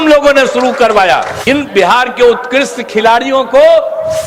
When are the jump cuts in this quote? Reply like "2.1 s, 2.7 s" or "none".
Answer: 1.4 s